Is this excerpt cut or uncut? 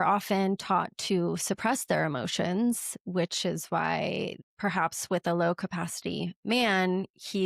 cut